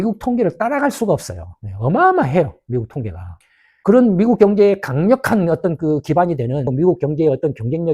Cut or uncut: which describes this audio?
cut